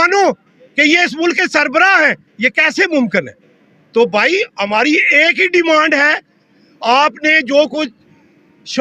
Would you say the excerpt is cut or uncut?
uncut